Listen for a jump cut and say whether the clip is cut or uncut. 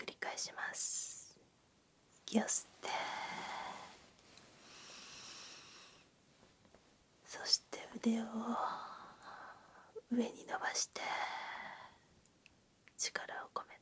uncut